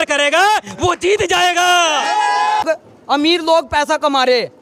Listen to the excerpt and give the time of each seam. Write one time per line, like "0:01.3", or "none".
0:02.6